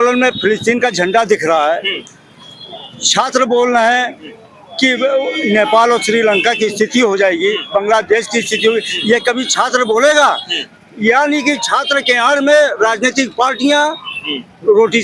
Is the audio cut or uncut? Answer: uncut